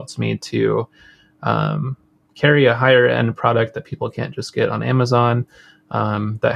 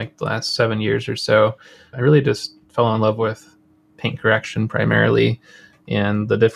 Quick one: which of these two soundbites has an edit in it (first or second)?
second